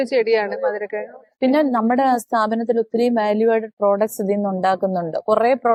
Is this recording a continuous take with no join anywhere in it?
yes; 0 cuts

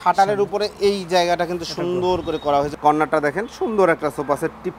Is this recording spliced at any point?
yes; 1 cut; at 2.7 s

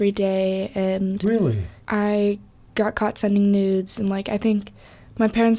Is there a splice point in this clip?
yes; 1 cut; at 1.7 s

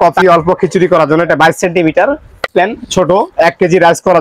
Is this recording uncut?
no; 1 cut; at 2.5 s

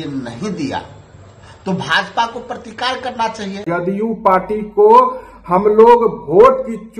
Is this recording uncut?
no; 1 cut; at 3.6 s

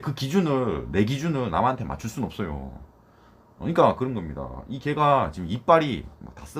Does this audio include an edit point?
no; 0 cuts

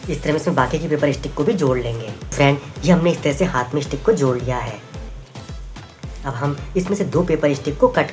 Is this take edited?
no; 0 cuts

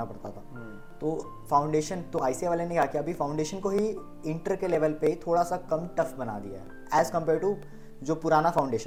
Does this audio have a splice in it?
no; 0 cuts

